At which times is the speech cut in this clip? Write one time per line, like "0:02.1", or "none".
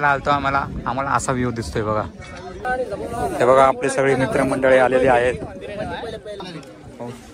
0:02.6
0:06.4

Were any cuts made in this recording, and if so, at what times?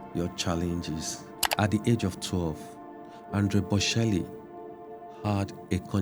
0:01.4

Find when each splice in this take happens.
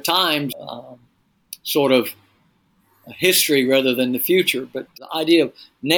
0:05.0

